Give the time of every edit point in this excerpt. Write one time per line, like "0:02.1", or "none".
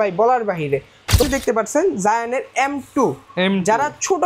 0:01.2

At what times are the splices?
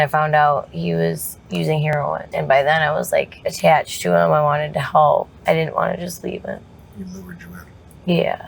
0:01.9
0:03.4
0:05.3
0:06.8

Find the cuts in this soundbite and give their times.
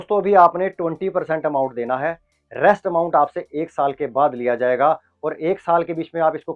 none

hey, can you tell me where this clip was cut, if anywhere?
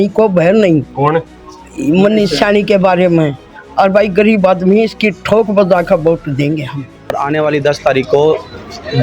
0:07.1

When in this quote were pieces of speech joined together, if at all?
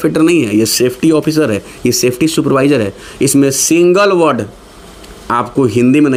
none

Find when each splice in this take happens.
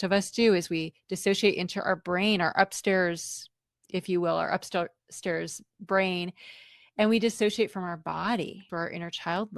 0:08.6

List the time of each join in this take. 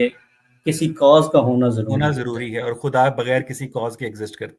none

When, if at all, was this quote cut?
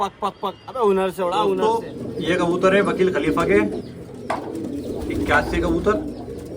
0:01.6

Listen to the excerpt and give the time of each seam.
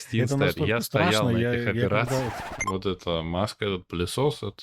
0:02.6

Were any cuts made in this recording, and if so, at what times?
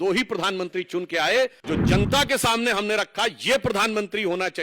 0:01.6

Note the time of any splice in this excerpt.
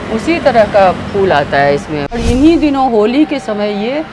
0:02.2

